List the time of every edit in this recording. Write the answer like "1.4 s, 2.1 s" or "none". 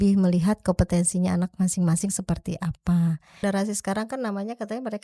3.4 s